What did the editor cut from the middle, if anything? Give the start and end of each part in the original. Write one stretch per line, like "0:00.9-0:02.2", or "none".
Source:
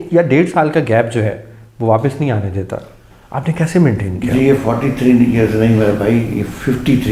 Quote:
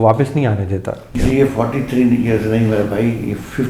0:02.9-0:04.2